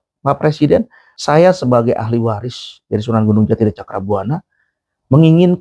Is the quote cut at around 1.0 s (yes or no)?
yes